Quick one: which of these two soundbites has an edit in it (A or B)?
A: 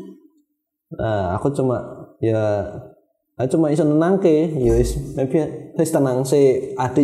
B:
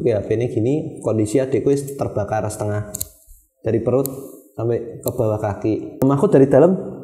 B